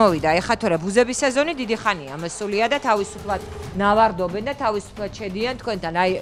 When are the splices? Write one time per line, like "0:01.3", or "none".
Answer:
none